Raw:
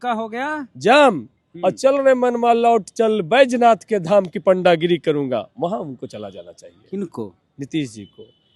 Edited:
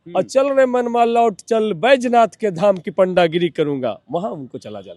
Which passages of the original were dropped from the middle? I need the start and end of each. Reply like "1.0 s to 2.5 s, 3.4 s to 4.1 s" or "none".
none